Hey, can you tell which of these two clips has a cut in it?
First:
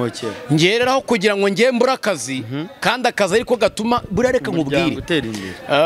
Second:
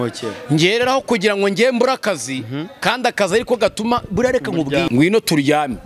second; 1 cut; at 4.9 s

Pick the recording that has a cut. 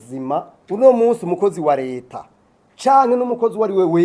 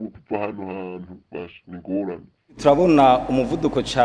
second; 1 cut; at 2.6 s

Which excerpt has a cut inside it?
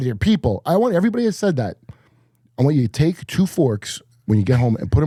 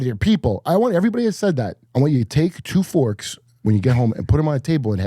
second; 1 cut; at 1.8 s

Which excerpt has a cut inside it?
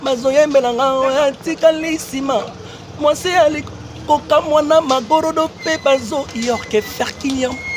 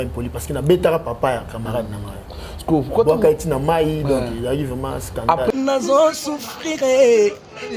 second; 1 cut; at 5.5 s

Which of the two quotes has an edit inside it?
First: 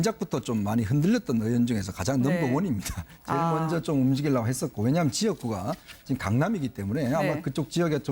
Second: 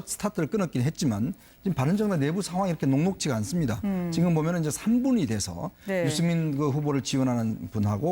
second; 1 cut; at 2.4 s

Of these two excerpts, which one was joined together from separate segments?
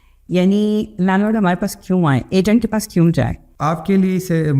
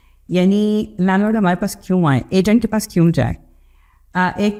first; 1 cut; at 3.4 s

